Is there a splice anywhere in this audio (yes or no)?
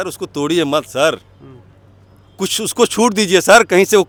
no